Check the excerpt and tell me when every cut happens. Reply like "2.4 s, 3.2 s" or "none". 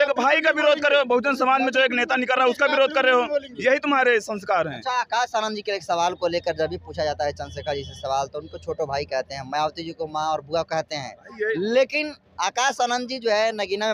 none